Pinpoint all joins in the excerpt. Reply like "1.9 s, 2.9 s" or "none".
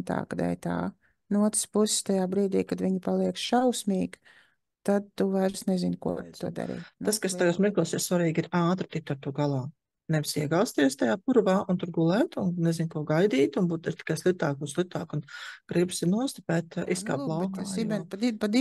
6.9 s, 17.6 s